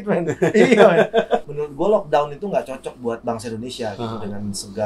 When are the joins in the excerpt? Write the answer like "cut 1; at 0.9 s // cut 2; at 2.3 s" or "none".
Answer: cut 1; at 1.4 s